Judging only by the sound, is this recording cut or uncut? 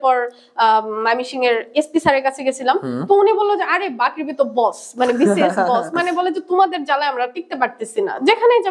uncut